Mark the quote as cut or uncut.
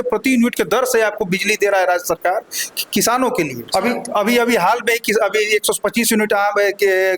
cut